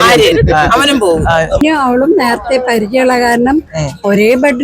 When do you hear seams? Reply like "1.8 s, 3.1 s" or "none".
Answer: 1.6 s